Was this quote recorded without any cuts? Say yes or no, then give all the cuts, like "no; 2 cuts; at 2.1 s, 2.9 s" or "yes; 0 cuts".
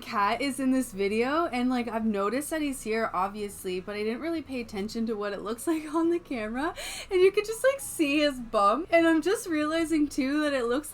no; 1 cut; at 8.8 s